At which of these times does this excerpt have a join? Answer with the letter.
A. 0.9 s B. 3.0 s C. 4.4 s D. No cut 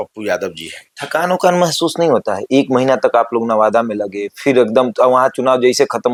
D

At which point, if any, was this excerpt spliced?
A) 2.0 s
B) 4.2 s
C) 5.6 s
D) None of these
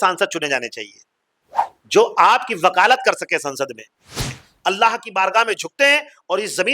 B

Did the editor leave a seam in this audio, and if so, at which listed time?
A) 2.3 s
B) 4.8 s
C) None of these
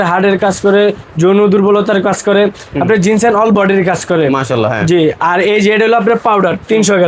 C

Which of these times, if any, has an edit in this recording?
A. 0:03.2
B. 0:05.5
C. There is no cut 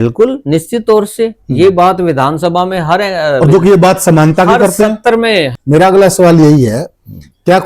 B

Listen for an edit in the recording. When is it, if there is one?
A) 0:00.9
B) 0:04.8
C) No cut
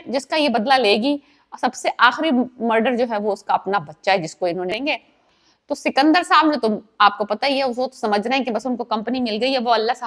B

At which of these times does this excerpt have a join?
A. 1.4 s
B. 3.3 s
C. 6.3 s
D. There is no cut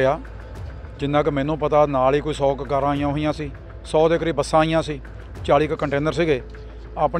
D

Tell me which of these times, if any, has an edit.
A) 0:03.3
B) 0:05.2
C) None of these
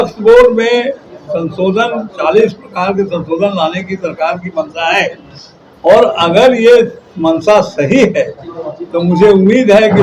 C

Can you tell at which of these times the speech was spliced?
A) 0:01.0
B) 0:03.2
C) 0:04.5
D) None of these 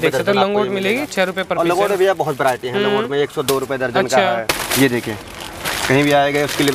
C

